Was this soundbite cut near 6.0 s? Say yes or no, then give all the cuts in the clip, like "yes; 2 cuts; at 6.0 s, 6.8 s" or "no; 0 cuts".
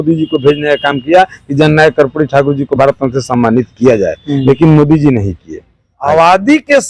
yes; 1 cut; at 6.0 s